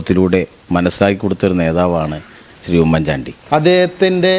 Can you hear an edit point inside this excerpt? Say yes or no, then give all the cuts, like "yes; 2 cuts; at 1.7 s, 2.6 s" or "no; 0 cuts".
yes; 1 cut; at 3.3 s